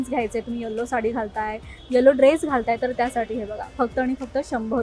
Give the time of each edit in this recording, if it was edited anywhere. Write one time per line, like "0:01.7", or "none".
none